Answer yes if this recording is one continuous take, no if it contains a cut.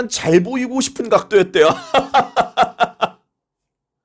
yes